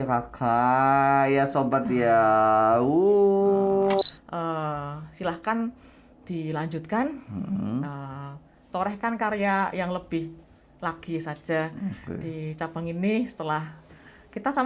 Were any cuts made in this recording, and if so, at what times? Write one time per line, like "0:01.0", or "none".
0:04.0